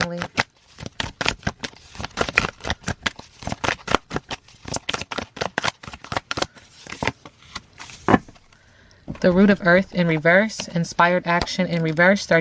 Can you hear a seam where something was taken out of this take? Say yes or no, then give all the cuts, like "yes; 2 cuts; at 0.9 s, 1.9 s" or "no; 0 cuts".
no; 0 cuts